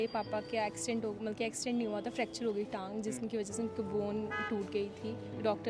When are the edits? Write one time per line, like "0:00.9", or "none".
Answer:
none

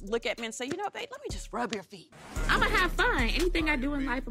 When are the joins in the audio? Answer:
0:02.2

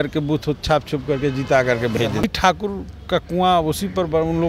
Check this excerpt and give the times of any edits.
0:02.2

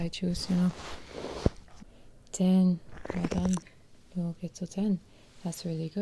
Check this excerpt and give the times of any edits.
0:01.8

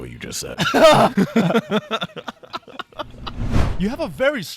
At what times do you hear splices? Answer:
0:03.6

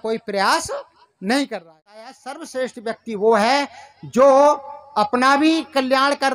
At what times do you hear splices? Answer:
0:02.1

